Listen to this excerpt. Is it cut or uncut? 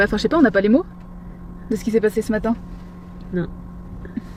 uncut